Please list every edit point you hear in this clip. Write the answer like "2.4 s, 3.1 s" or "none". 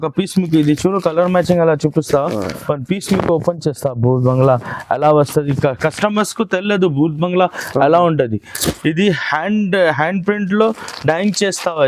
none